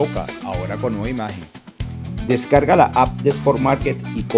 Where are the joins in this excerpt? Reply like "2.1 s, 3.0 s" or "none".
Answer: none